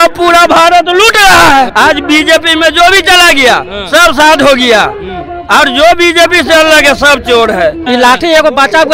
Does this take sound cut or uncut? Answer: cut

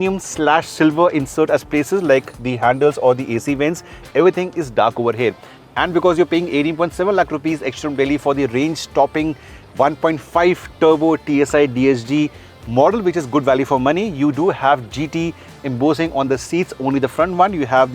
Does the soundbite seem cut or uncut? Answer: uncut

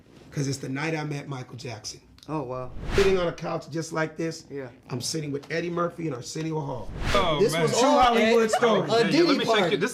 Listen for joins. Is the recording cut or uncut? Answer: cut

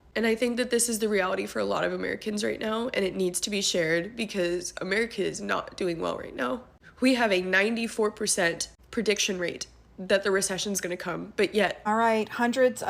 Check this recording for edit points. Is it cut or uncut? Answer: cut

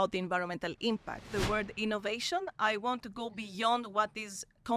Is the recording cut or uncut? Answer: cut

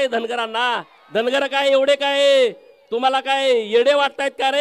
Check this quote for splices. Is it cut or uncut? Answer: cut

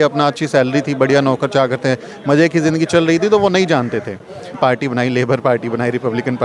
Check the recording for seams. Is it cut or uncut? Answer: cut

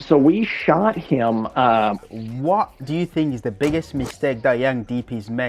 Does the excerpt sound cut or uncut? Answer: cut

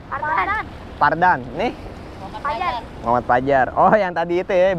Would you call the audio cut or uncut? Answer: uncut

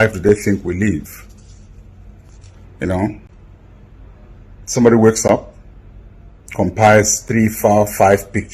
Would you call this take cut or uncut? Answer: uncut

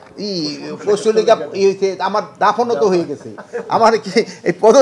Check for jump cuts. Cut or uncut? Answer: uncut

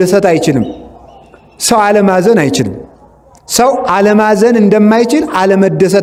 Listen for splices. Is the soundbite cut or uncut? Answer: uncut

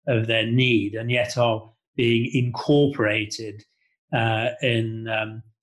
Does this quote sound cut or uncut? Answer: uncut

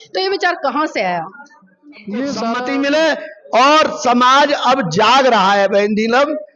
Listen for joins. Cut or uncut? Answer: cut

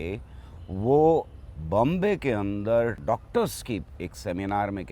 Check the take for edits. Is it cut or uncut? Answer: cut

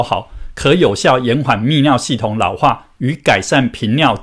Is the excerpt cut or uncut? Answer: uncut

